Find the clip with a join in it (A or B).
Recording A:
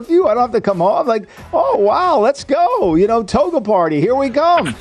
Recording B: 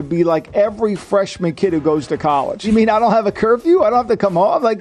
B